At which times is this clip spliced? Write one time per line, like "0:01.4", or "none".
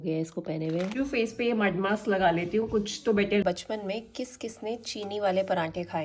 0:00.9
0:03.4